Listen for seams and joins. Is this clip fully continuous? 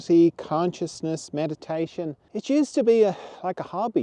no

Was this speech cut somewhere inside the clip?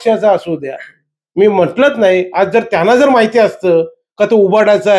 no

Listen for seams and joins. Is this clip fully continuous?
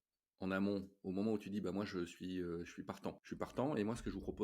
no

